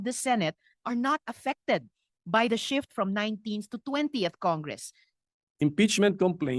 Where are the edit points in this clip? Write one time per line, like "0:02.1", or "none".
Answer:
0:05.1